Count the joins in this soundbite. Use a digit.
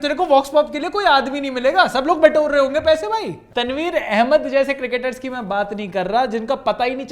1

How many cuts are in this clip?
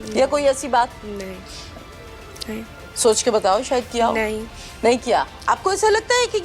2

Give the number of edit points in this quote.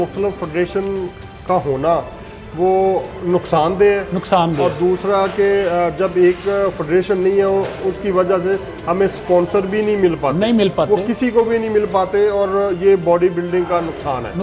0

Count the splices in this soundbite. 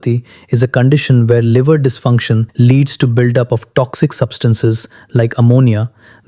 1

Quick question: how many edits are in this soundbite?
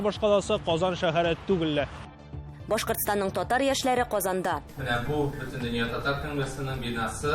1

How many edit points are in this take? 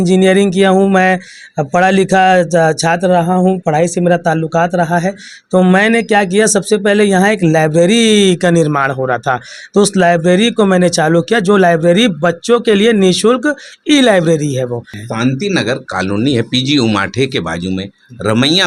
1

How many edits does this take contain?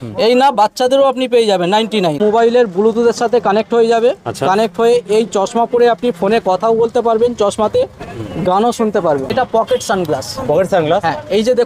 2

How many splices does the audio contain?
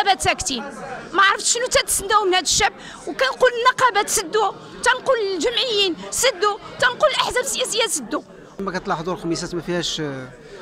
1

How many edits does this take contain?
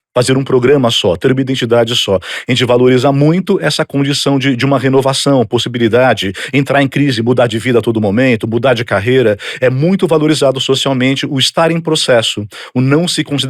0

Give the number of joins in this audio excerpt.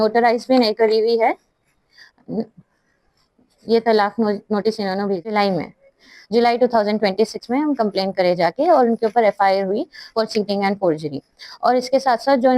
1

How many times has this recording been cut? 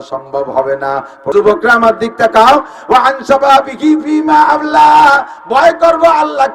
1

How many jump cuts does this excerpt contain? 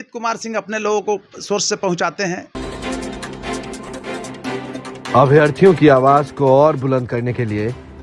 1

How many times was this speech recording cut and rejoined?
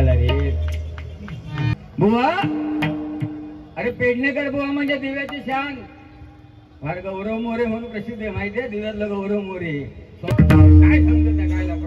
2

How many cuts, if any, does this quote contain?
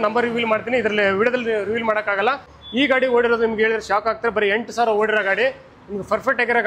1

